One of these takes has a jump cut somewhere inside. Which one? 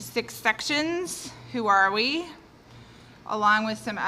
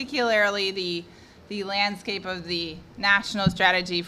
second; 1 cut; at 2.5 s

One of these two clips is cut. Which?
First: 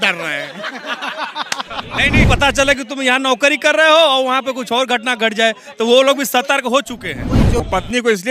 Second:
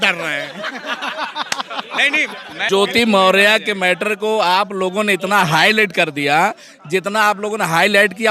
first; 2 cuts; at 2.3 s, 7.6 s

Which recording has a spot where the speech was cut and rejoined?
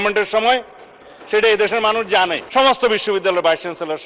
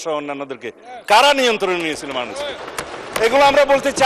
first; 1 cut; at 2.4 s

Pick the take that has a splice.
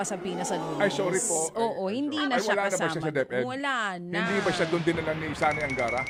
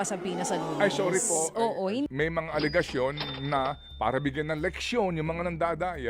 second; 1 cut; at 2.1 s

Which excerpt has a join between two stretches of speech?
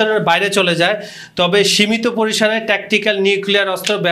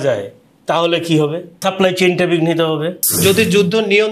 second; 2 cuts; at 1.5 s, 3.2 s

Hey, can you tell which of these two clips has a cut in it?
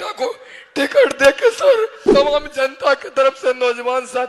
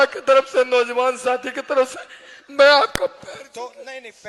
first; 1 cut; at 2.0 s

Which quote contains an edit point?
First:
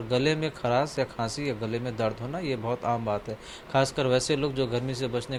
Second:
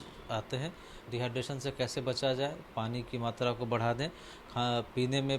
second; 1 cut; at 1.0 s

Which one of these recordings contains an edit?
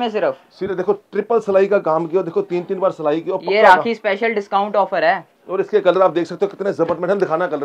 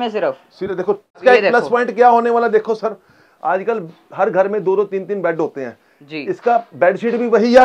second; 1 cut; at 1.2 s

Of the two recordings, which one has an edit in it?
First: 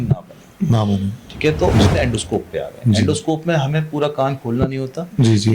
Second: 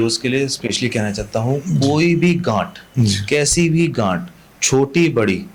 first; 1 cut; at 1.9 s

